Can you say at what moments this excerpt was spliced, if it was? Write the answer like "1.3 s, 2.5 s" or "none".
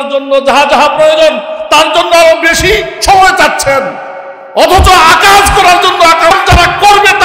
6.3 s